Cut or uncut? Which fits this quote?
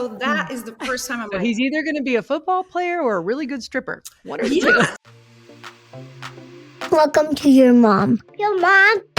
cut